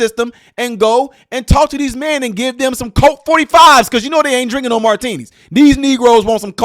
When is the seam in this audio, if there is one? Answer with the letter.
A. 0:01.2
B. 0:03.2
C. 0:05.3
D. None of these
D